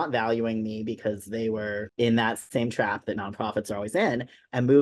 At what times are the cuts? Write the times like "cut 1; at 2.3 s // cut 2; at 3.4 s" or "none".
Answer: cut 1; at 1.9 s // cut 2; at 2.4 s